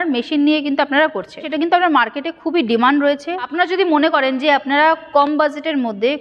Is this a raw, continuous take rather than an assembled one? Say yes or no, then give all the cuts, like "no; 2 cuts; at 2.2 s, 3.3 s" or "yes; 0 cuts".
no; 2 cuts; at 1.4 s, 3.5 s